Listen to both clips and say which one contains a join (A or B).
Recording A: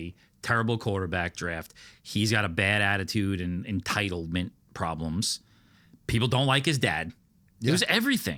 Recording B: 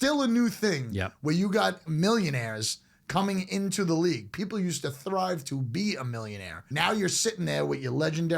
B